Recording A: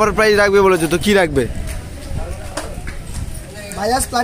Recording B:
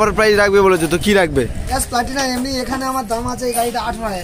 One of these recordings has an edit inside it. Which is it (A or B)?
B